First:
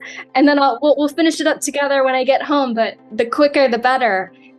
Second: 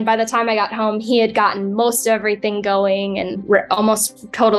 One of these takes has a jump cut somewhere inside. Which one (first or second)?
second